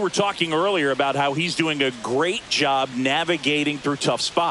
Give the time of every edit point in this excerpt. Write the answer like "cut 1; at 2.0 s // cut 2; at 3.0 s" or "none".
none